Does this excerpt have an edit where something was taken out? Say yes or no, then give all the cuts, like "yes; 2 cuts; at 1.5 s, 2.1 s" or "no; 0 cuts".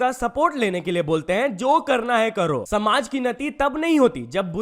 yes; 1 cut; at 2.5 s